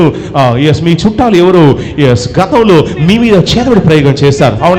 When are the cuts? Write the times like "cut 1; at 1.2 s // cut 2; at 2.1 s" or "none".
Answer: none